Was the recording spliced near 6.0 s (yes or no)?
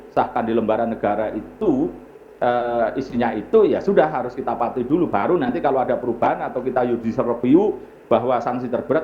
no